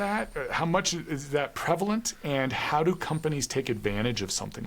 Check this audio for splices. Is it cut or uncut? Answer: uncut